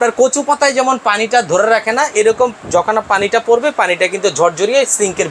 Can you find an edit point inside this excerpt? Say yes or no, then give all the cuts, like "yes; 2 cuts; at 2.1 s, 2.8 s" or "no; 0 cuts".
no; 0 cuts